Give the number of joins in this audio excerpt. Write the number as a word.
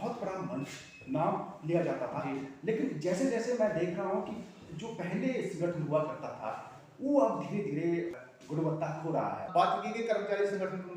two